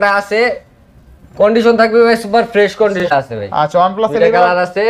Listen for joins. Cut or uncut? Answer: cut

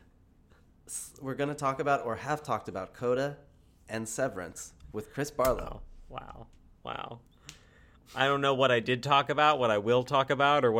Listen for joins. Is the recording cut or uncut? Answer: uncut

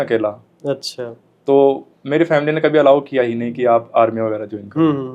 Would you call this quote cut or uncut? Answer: uncut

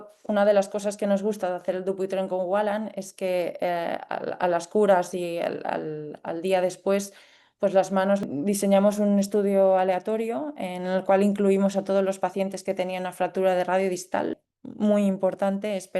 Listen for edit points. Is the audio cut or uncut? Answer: cut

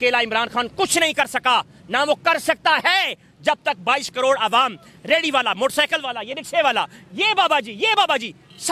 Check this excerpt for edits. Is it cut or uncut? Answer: uncut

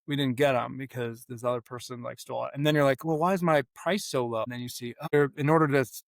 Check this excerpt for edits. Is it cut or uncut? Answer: cut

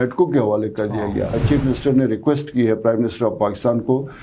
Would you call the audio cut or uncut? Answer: cut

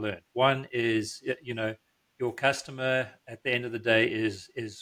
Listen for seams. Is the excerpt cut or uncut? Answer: uncut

